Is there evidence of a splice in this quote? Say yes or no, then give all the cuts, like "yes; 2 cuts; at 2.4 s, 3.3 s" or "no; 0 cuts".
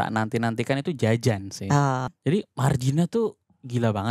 yes; 1 cut; at 2.2 s